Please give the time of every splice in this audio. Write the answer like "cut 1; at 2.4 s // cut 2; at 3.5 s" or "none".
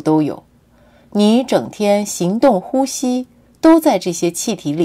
cut 1; at 3.8 s